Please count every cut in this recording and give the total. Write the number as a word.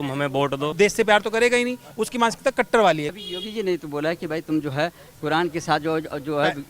two